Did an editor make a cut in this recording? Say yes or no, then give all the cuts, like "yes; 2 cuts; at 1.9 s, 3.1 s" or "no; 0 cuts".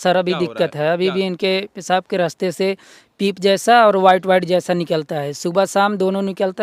no; 0 cuts